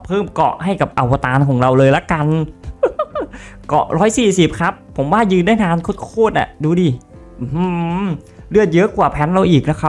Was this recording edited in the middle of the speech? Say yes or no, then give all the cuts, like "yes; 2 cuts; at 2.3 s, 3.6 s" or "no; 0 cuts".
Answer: no; 0 cuts